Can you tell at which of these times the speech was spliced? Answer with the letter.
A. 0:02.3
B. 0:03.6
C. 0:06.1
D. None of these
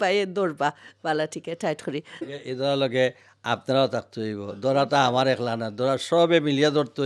A